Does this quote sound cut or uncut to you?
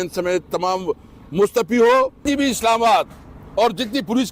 cut